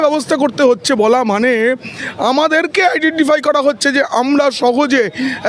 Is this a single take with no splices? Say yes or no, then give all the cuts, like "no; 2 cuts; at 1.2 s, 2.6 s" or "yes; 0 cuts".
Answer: yes; 0 cuts